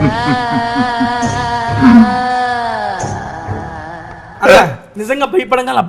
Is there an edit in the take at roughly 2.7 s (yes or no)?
no